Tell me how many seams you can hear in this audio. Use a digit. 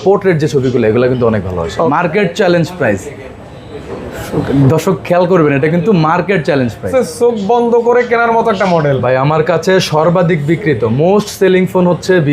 2